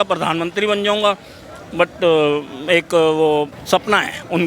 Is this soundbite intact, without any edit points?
no; 1 cut; at 3.6 s

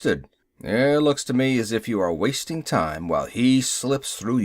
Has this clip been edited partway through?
yes; 1 cut; at 1.7 s

